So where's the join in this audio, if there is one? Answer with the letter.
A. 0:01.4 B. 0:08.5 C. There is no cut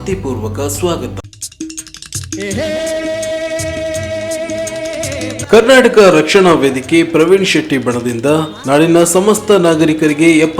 A